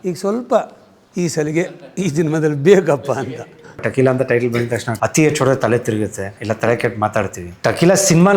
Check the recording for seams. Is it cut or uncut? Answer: cut